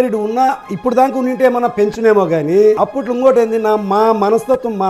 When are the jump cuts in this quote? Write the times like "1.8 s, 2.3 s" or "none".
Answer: 2.8 s